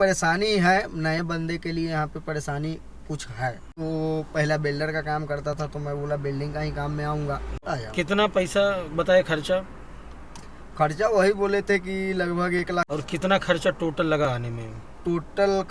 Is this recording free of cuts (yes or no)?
no